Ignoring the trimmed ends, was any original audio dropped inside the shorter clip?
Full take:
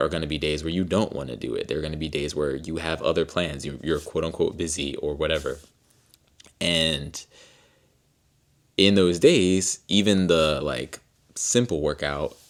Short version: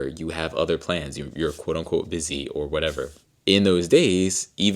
yes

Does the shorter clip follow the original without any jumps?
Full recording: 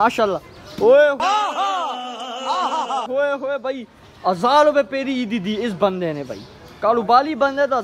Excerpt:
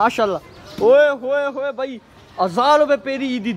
no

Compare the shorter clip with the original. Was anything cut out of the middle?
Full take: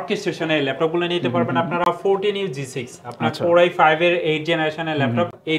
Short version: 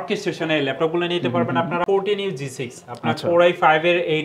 yes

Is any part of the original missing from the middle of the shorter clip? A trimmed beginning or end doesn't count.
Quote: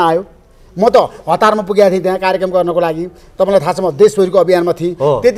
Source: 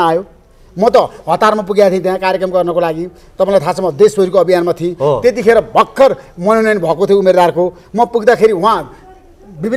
no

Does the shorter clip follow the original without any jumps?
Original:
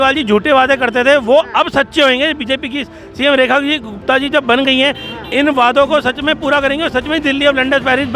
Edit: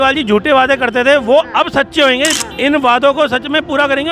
no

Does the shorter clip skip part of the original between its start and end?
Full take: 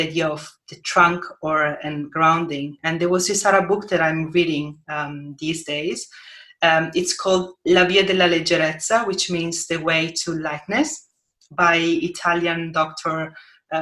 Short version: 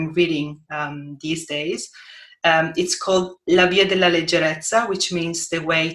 no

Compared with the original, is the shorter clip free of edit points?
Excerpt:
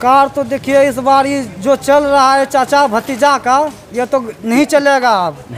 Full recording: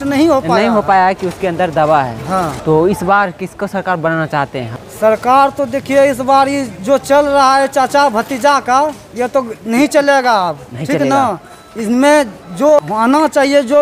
yes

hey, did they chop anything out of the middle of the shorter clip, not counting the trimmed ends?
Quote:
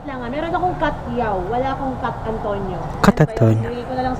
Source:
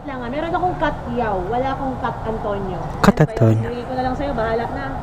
no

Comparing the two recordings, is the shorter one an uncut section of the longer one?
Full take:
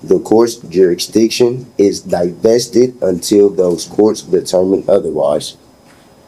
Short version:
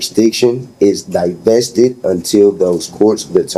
yes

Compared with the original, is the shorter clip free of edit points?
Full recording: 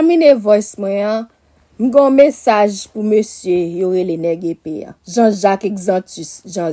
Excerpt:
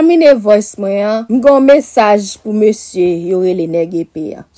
no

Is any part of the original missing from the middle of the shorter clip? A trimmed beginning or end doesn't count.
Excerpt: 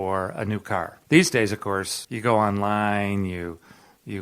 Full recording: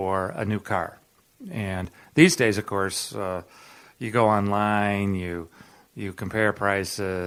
yes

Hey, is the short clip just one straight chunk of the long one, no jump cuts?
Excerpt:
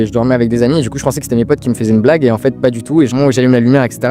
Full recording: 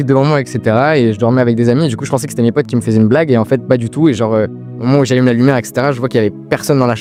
no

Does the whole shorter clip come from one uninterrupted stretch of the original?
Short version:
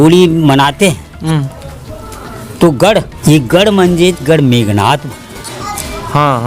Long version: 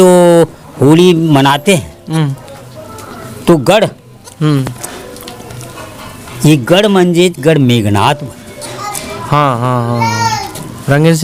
no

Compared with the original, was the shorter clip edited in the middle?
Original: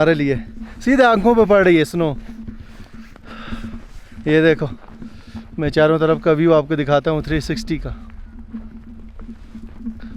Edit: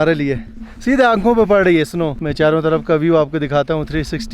yes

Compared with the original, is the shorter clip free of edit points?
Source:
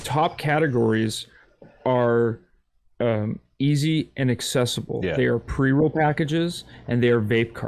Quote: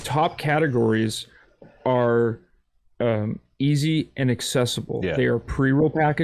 yes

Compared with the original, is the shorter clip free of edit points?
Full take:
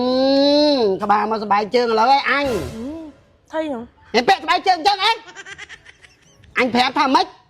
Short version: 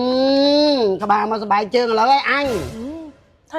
yes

